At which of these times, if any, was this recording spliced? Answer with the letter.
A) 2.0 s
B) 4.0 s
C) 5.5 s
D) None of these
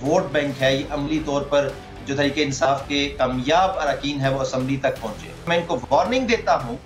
C